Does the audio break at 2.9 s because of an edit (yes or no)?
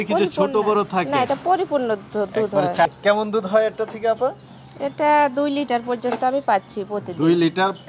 yes